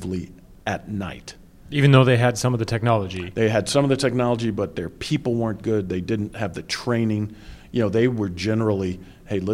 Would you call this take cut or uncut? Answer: uncut